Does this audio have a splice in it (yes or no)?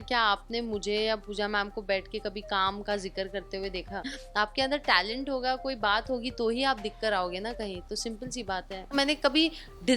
yes